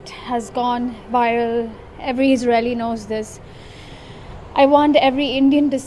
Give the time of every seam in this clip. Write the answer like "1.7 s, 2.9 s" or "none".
none